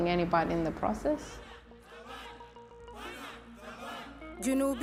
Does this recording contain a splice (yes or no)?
no